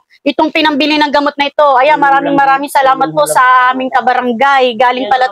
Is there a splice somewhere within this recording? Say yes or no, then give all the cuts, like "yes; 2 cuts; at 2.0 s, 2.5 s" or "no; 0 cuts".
no; 0 cuts